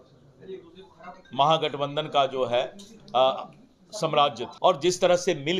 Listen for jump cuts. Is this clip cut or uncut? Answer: cut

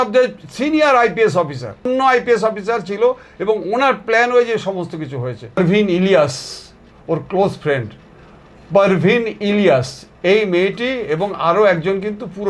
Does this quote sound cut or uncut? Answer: cut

